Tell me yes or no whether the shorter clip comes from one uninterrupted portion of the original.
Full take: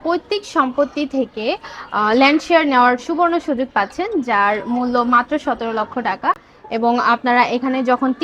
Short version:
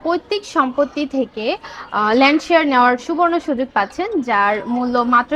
yes